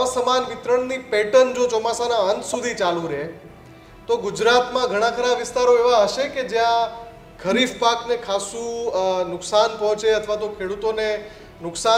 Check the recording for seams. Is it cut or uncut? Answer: uncut